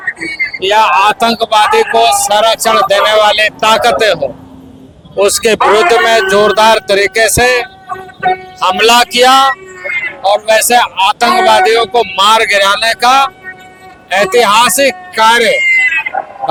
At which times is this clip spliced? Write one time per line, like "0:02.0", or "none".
none